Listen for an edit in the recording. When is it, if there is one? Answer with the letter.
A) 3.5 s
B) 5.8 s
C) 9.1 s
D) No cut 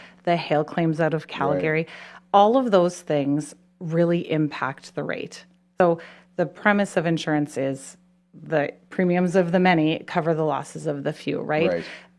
B